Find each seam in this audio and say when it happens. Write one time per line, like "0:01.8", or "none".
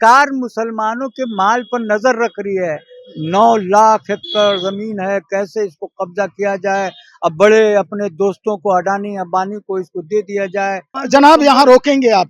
0:11.0

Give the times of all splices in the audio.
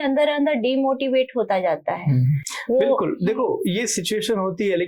0:02.5

